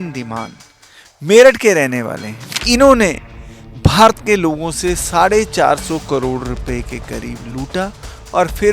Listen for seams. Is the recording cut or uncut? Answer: cut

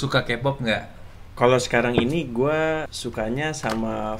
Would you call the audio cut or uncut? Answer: cut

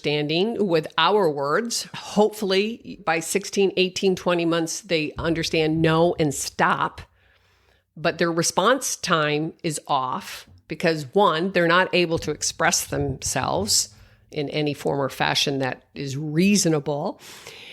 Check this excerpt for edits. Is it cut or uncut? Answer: cut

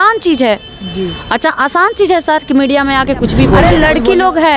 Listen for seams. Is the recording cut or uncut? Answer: cut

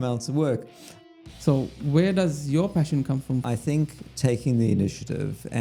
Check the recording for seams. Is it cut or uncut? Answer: cut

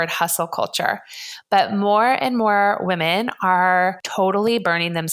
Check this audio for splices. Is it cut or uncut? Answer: cut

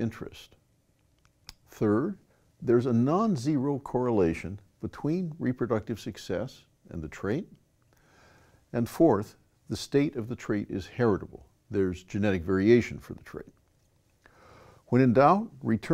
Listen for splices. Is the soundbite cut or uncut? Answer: cut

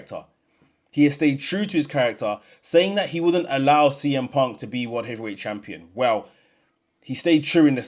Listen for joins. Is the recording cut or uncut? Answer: uncut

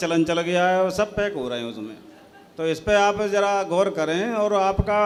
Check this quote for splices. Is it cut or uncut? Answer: uncut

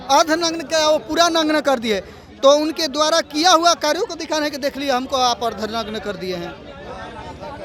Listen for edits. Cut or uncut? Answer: uncut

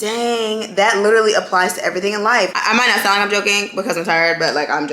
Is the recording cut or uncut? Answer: cut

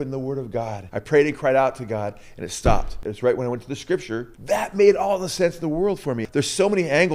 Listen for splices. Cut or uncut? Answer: cut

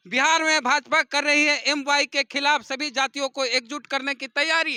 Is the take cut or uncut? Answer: uncut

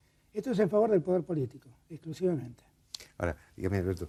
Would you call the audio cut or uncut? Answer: uncut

